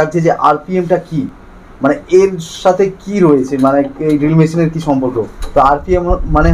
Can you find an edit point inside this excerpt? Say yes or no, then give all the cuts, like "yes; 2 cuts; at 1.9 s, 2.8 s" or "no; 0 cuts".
no; 0 cuts